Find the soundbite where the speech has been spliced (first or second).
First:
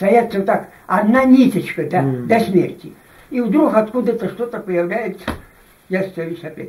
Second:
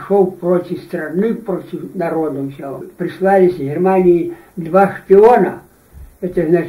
second